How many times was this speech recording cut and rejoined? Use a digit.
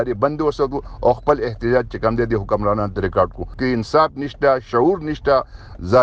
1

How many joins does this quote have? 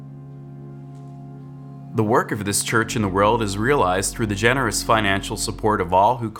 1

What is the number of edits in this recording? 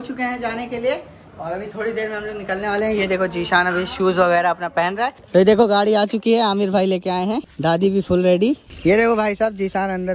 3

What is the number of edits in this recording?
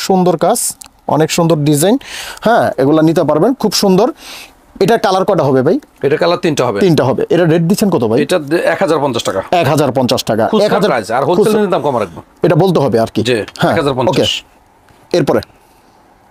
0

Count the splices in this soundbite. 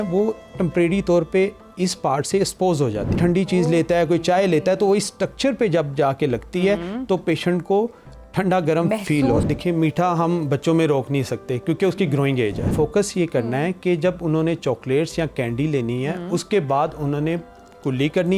3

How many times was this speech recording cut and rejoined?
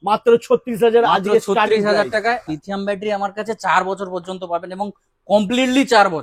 1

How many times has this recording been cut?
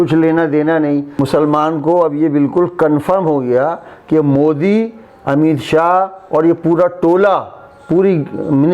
1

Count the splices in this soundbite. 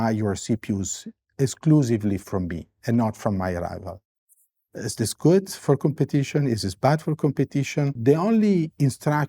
1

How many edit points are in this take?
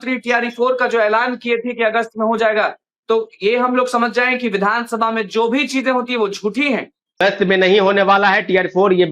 1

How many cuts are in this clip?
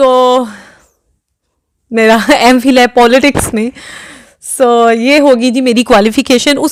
0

